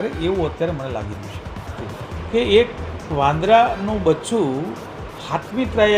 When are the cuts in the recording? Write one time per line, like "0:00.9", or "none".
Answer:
0:01.9